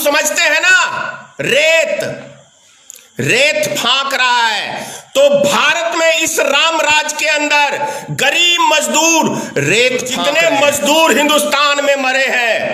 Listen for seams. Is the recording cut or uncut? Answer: cut